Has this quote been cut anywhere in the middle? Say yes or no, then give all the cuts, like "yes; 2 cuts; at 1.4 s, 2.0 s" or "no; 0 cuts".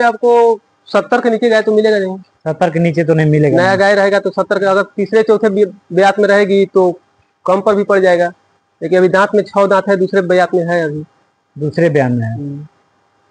no; 0 cuts